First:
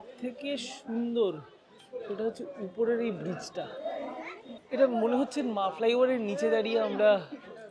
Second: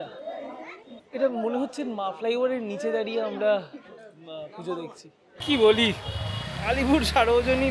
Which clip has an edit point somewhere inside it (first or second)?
second